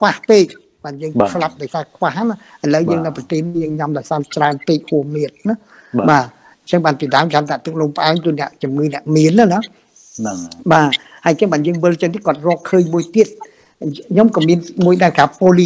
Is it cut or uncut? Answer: uncut